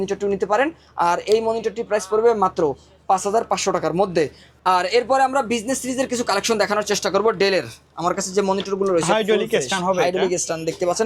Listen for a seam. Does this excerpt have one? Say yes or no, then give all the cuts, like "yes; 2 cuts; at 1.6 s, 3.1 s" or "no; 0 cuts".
no; 0 cuts